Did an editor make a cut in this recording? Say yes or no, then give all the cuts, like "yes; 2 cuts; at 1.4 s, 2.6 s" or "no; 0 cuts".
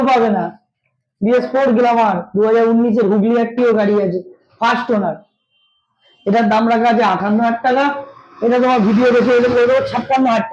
no; 0 cuts